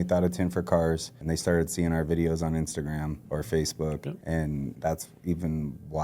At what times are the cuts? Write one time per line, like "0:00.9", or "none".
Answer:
0:01.1
0:03.2
0:04.5